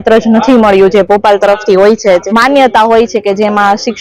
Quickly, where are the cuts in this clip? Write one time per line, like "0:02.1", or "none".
0:02.2